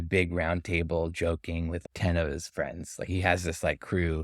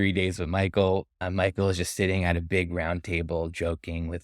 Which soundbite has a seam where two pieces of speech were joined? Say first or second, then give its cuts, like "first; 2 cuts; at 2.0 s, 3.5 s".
second; 1 cut; at 1.2 s